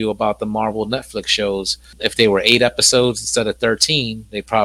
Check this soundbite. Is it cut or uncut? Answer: cut